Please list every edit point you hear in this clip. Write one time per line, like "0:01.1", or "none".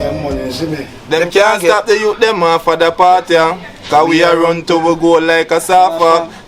0:00.9